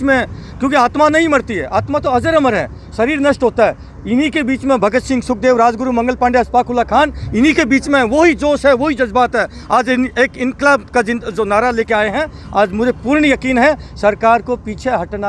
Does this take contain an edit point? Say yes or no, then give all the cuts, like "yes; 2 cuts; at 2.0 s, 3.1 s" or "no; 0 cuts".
no; 0 cuts